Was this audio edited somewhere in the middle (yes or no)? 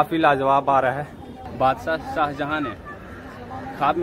yes